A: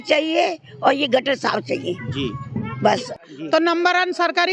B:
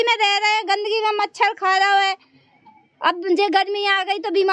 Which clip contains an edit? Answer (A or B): A